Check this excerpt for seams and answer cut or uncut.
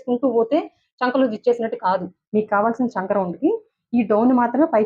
cut